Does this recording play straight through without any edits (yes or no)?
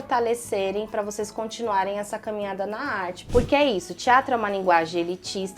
no